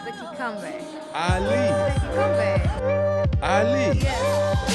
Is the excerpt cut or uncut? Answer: uncut